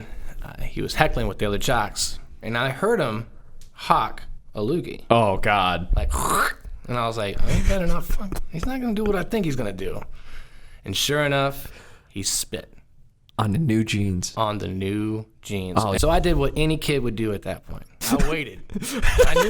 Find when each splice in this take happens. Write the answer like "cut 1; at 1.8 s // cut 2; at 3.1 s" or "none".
cut 1; at 2.4 s // cut 2; at 16.0 s // cut 3; at 18.0 s